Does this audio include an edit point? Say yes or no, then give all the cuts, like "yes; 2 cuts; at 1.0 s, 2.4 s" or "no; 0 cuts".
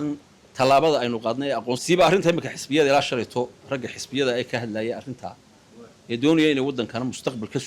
yes; 1 cut; at 1.8 s